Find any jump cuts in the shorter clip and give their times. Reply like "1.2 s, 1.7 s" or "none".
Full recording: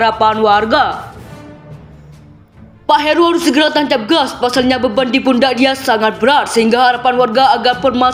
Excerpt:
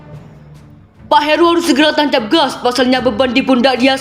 1.0 s